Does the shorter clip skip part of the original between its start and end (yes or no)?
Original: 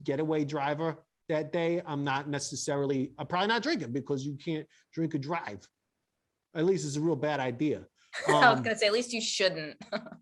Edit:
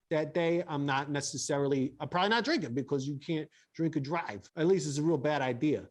yes